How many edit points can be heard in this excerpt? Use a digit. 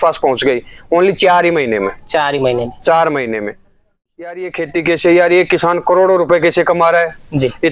1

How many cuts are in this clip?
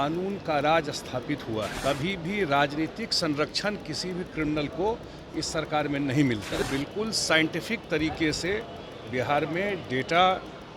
2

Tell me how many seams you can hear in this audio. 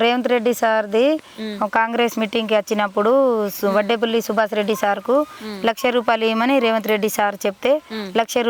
0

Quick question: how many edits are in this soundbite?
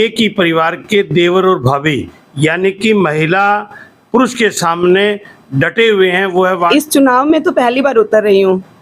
1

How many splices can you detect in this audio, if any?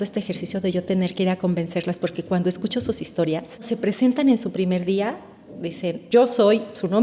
2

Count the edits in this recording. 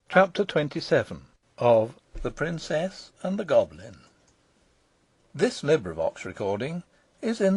1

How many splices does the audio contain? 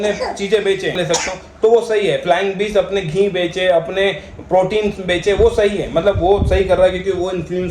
1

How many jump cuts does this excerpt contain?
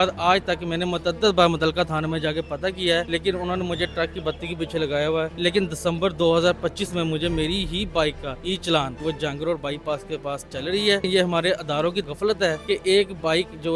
6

